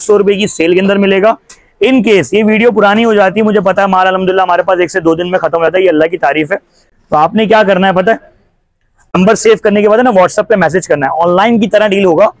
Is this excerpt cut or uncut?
cut